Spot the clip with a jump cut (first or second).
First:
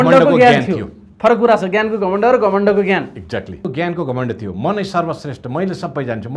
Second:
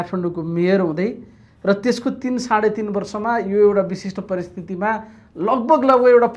first